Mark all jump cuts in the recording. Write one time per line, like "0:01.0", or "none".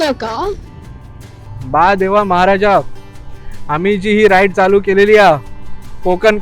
0:01.5